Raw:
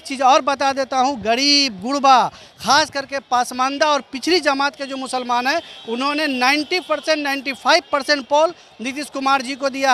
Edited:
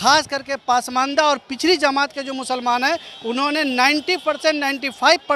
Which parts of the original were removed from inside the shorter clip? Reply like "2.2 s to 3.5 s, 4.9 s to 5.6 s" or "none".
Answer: none